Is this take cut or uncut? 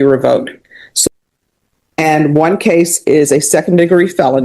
cut